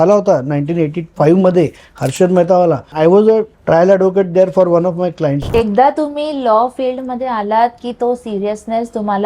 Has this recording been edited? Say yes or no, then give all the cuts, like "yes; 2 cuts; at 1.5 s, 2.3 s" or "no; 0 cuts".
yes; 4 cuts; at 1.1 s, 2.9 s, 3.5 s, 5.4 s